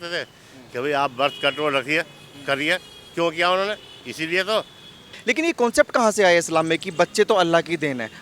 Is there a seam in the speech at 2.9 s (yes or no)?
no